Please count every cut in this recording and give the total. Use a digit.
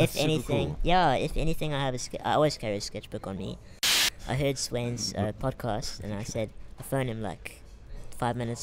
1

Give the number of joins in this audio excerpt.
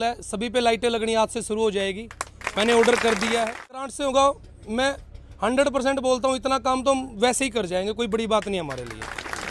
1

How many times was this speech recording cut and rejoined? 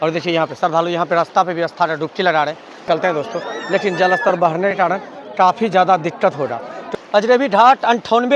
2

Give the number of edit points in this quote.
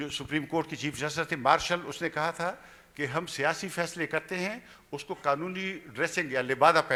0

